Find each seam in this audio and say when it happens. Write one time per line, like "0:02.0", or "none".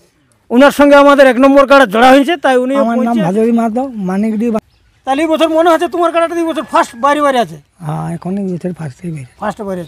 0:02.9
0:04.6